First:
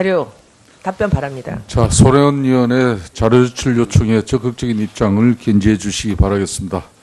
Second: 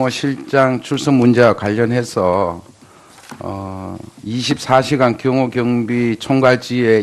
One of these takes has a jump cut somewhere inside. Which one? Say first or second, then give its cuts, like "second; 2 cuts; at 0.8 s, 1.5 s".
first; 1 cut; at 3.5 s